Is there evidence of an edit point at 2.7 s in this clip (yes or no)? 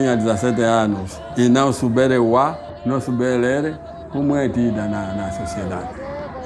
yes